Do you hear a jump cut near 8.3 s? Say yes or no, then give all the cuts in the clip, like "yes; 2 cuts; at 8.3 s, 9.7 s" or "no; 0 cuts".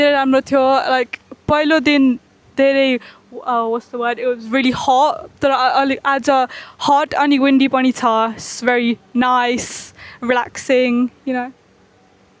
no; 0 cuts